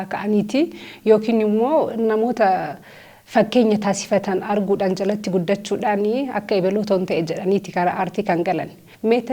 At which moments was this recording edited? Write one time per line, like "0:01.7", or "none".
none